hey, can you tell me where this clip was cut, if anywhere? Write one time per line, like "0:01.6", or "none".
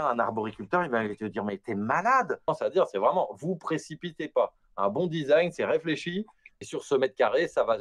0:02.5
0:06.6